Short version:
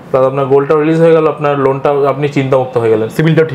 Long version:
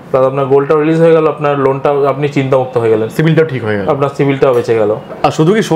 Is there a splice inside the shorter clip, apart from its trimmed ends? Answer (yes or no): no